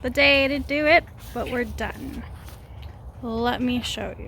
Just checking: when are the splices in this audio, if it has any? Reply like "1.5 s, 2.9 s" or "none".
none